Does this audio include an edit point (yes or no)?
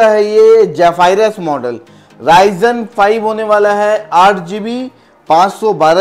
no